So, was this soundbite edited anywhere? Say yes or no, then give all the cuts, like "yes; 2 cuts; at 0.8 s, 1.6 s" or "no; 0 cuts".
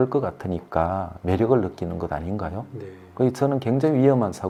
no; 0 cuts